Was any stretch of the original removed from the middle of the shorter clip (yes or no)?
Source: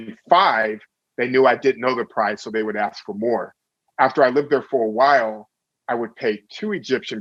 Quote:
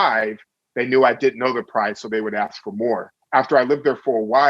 yes